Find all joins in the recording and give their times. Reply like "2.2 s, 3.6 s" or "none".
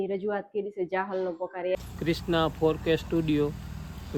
1.8 s